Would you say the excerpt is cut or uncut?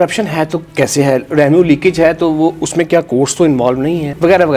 uncut